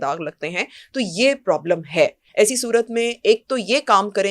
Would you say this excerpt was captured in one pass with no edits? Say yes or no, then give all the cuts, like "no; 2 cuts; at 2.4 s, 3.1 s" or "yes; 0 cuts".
no; 1 cut; at 2.2 s